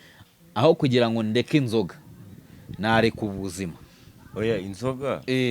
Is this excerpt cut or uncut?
uncut